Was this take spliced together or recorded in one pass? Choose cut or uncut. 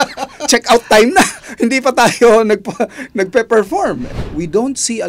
cut